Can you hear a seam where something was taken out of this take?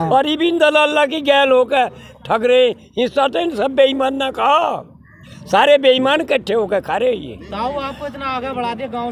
no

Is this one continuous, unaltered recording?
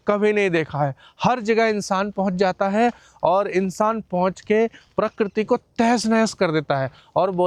yes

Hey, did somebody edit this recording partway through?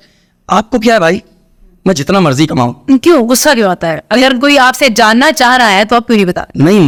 no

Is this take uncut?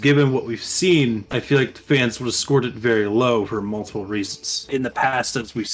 no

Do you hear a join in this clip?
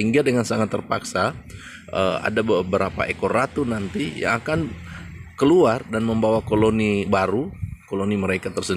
no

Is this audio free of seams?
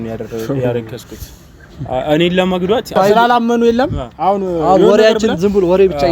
no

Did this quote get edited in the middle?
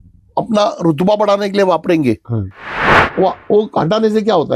yes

